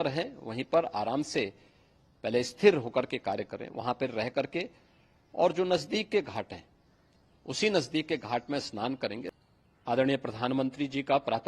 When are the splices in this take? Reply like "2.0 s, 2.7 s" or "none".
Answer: 9.3 s